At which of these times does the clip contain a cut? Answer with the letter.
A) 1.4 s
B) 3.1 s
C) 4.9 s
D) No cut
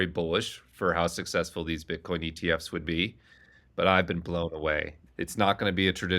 C